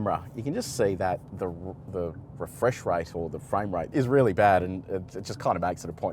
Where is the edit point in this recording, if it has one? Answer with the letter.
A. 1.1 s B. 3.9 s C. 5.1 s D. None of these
B